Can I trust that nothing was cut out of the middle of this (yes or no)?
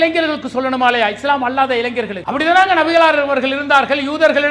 no